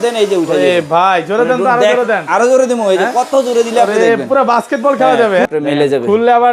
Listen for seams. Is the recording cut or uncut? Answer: cut